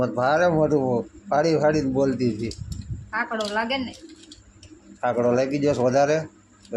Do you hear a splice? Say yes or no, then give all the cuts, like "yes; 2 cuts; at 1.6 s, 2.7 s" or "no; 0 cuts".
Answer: no; 0 cuts